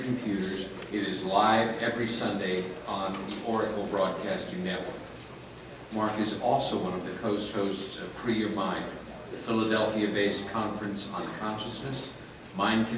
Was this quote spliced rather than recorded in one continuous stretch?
no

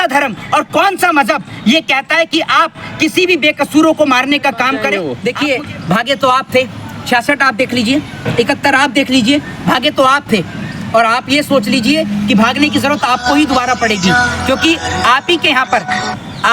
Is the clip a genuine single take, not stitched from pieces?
no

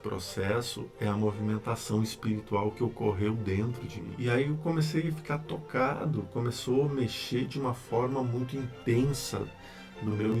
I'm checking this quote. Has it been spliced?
yes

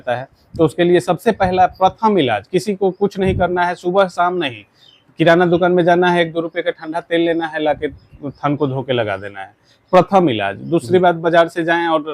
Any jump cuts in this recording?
no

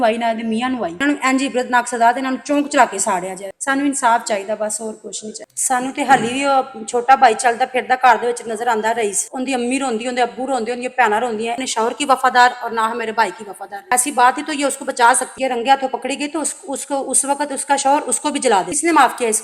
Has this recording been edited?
yes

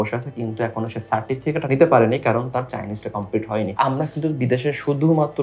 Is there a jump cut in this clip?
yes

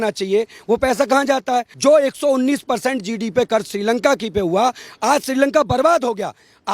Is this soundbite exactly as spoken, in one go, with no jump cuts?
no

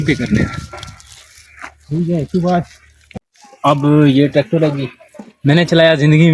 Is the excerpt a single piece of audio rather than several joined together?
no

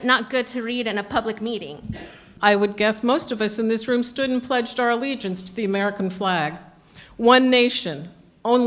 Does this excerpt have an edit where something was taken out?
yes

